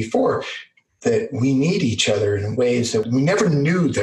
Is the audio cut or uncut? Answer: cut